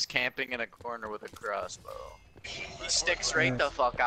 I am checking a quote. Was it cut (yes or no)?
yes